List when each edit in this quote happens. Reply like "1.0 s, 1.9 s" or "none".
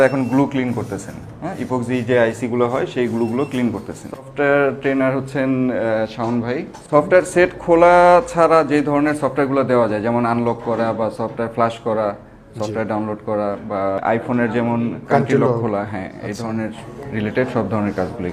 4.3 s